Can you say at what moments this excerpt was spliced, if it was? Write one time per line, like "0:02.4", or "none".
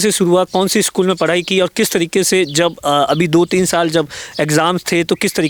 none

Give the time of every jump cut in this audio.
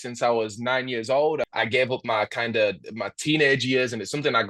0:01.5

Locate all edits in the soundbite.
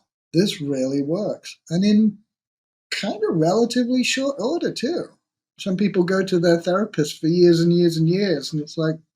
0:05.6

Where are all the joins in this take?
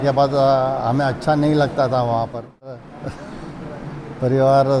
0:02.8

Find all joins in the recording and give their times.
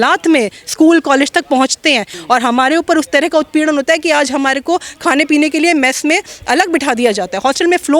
0:02.1

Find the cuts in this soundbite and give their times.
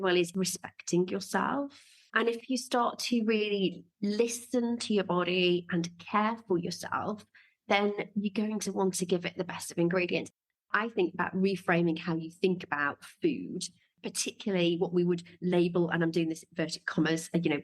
0:10.4
0:13.9

